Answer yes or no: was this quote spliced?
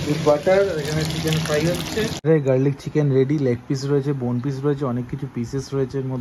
yes